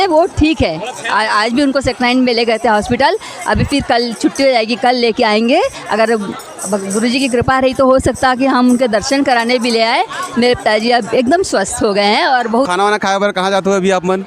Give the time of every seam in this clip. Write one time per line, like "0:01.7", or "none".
0:12.7